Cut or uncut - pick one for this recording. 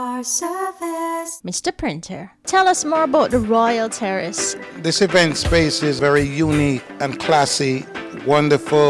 cut